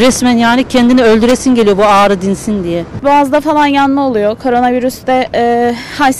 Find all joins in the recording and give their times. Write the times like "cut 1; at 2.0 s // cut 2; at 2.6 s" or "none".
cut 1; at 3.0 s